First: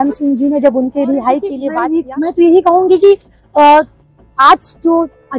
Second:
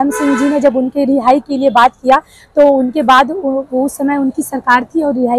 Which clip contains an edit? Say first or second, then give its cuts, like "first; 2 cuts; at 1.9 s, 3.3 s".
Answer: first; 1 cut; at 1.7 s